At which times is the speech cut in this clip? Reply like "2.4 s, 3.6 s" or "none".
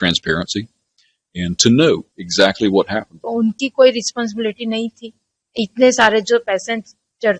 3.2 s